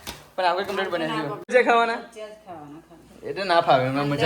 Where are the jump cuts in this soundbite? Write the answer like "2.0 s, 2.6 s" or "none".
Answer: 1.5 s